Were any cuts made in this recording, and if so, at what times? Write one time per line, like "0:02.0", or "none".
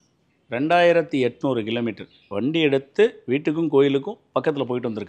none